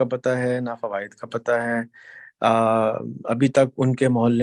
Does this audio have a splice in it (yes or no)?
no